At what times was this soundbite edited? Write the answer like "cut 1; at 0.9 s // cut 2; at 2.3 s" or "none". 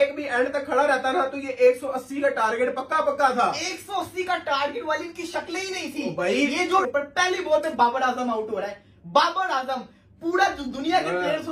cut 1; at 6.8 s